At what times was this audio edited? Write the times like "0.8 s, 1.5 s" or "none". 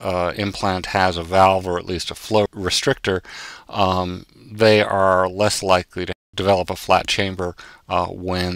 2.5 s, 6.1 s